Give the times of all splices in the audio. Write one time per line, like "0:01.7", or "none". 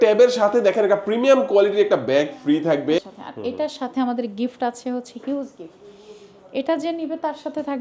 0:03.0